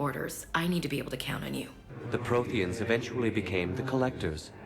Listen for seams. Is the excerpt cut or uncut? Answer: cut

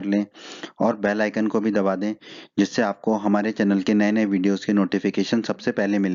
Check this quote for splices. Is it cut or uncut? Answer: cut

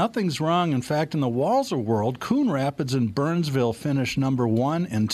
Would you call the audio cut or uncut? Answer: uncut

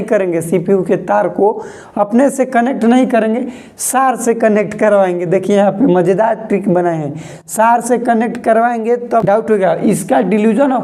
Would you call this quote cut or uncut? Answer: cut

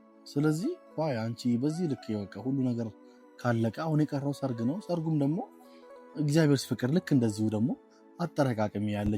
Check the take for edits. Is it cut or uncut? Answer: uncut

